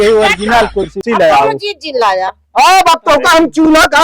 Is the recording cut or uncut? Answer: cut